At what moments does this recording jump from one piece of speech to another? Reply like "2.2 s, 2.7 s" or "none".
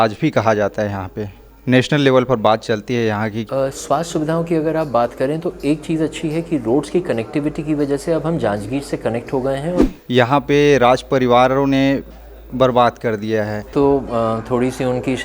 3.4 s, 9.8 s, 13.6 s

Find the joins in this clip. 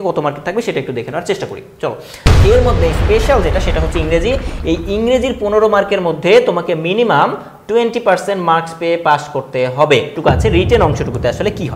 2.2 s, 10.1 s

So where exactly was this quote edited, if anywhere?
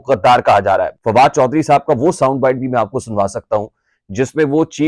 0.9 s

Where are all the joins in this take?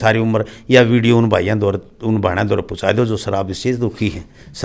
none

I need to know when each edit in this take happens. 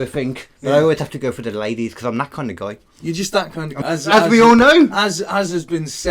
3.7 s

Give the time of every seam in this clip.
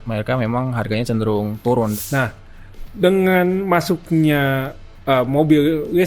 1.9 s

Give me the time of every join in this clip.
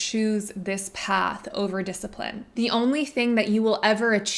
2.4 s

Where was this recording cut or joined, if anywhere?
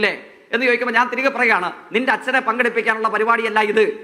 none

